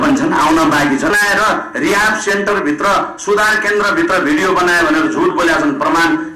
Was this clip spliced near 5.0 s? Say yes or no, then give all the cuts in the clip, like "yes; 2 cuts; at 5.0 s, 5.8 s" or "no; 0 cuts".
no; 1 cut; at 1.1 s